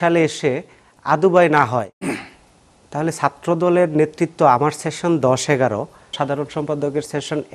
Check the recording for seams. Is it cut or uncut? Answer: cut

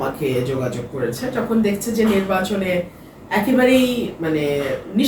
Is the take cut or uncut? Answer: uncut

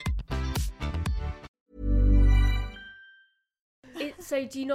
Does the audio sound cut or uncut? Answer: cut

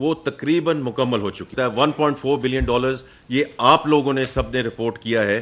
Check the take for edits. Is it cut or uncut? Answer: cut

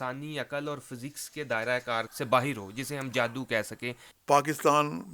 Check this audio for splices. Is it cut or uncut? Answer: cut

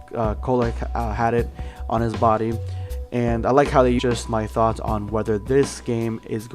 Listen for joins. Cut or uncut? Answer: uncut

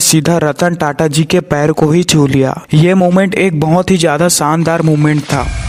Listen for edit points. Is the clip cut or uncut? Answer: uncut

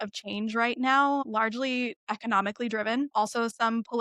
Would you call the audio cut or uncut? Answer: cut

